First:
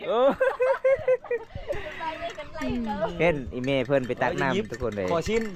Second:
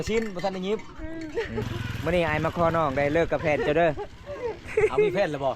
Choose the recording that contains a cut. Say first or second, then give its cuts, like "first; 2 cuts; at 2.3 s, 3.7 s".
second; 1 cut; at 1.6 s